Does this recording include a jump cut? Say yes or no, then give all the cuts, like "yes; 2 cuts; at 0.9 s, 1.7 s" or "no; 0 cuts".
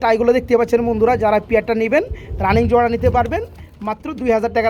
no; 0 cuts